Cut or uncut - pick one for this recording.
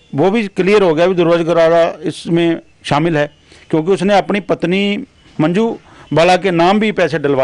uncut